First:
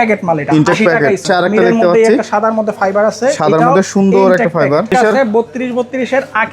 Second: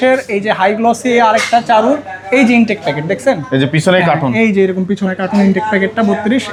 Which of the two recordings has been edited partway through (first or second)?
first